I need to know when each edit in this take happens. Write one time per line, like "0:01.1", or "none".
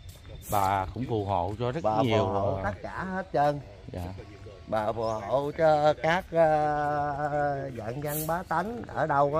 none